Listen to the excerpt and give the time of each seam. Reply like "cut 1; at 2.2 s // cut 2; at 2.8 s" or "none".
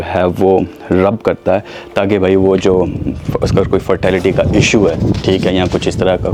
none